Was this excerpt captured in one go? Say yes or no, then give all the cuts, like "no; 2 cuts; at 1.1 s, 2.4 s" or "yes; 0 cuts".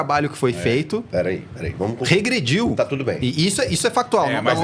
yes; 0 cuts